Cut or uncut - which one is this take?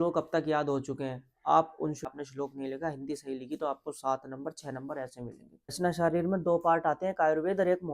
cut